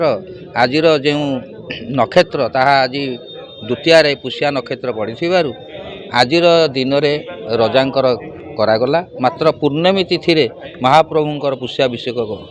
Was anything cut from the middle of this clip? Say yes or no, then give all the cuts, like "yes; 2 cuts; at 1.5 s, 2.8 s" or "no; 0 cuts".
no; 0 cuts